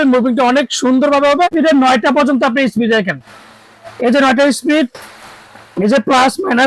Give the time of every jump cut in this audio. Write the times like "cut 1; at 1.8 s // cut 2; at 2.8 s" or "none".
cut 1; at 1.5 s